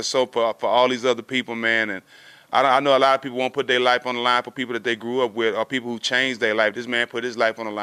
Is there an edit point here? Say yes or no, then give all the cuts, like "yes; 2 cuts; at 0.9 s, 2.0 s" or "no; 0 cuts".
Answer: no; 0 cuts